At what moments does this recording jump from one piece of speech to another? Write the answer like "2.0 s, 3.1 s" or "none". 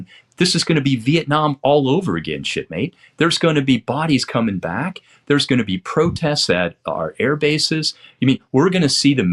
none